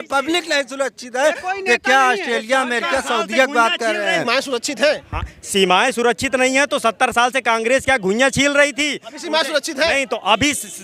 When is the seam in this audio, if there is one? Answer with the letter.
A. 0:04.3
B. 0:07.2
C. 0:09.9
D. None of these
A